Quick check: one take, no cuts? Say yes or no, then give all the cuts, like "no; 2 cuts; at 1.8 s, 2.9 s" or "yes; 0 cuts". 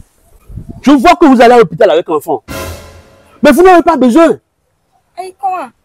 yes; 0 cuts